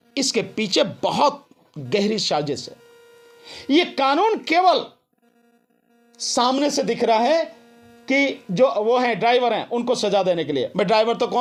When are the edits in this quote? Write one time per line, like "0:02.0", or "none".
none